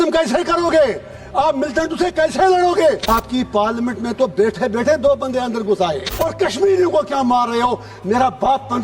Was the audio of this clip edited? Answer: yes; 2 cuts; at 3.0 s, 6.1 s

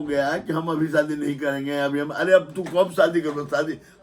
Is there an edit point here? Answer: no; 0 cuts

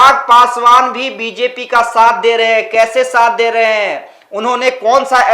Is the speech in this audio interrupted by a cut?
no; 0 cuts

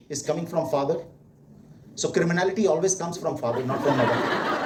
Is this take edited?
no; 0 cuts

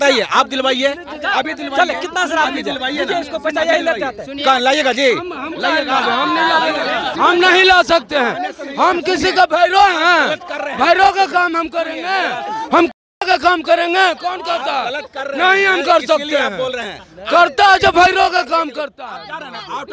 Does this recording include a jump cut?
no; 0 cuts

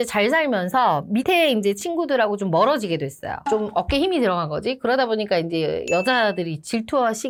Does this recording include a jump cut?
no; 0 cuts

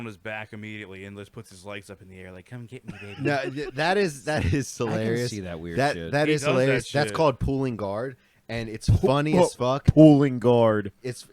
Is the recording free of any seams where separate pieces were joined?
yes; 0 cuts

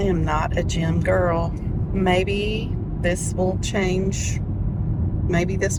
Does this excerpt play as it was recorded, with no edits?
yes; 0 cuts

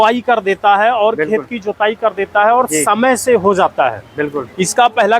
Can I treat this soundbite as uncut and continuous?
yes; 0 cuts

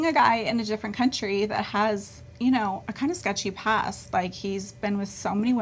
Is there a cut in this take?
no; 0 cuts

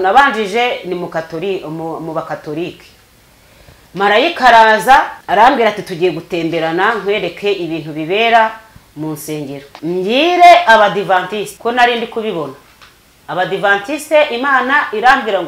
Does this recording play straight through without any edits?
no; 3 cuts; at 5.2 s, 9.7 s, 11.5 s

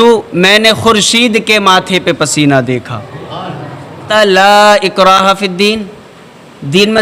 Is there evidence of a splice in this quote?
yes; 1 cut; at 4.1 s

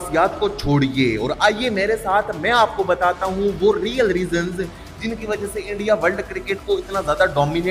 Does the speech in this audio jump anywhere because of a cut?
no; 0 cuts

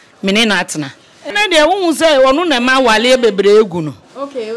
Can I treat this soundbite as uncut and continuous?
no; 1 cut; at 1.3 s

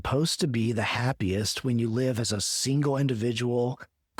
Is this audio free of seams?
yes; 0 cuts

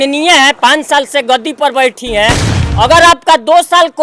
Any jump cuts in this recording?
yes; 1 cut; at 2.5 s

